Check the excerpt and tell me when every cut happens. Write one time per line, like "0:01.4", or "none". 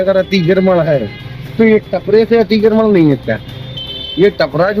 none